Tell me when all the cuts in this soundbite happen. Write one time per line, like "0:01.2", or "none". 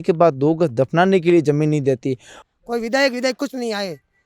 0:02.4